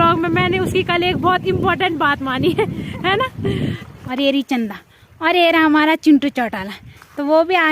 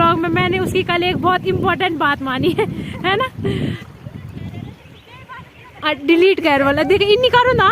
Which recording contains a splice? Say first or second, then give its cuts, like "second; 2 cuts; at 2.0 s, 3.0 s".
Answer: first; 1 cut; at 3.9 s